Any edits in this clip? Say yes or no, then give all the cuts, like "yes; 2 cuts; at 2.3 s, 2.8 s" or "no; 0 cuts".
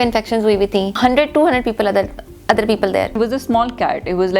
yes; 2 cuts; at 1.0 s, 3.1 s